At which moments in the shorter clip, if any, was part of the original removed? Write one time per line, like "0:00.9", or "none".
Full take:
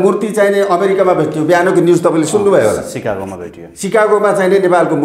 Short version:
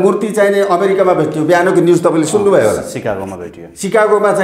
none